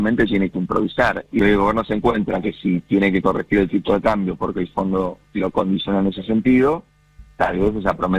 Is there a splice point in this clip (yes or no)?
yes